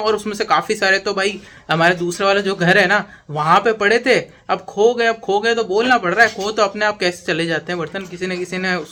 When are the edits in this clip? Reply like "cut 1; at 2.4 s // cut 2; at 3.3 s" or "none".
none